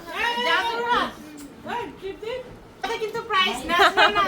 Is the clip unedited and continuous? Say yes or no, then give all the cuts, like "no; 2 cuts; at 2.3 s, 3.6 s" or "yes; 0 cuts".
no; 1 cut; at 2.8 s